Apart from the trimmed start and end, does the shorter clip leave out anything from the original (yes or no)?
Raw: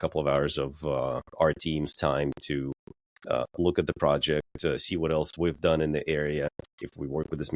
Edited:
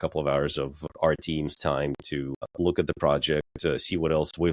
yes